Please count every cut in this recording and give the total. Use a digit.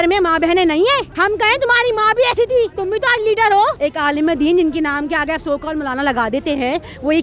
3